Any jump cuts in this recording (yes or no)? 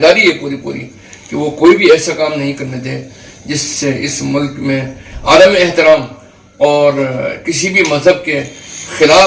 no